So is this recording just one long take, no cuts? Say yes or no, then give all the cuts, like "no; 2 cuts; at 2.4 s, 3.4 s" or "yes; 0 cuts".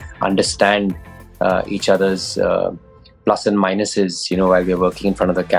yes; 0 cuts